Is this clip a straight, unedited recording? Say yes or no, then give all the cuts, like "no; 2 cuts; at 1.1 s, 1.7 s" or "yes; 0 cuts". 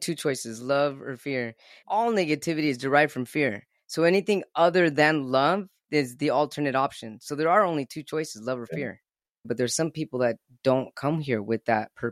no; 3 cuts; at 1.8 s, 5.8 s, 9.4 s